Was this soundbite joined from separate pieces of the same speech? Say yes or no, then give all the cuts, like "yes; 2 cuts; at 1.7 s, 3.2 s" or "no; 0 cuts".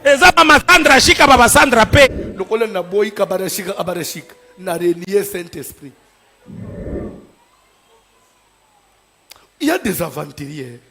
yes; 1 cut; at 2.1 s